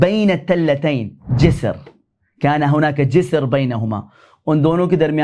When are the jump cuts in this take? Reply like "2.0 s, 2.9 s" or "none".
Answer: 1.2 s